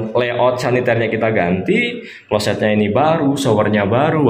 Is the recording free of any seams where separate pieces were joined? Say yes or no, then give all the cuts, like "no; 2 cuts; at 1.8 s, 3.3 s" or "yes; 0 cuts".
yes; 0 cuts